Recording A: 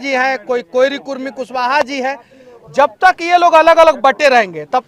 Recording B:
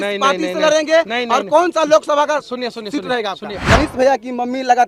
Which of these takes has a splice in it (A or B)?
B